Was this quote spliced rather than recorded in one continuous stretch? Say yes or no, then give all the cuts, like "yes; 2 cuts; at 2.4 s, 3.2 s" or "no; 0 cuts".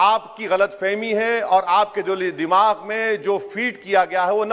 no; 0 cuts